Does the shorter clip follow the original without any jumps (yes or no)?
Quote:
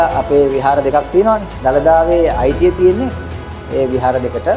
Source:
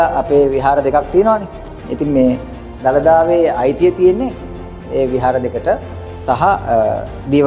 no